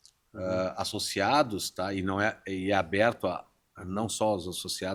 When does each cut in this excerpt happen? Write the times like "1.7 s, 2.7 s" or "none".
none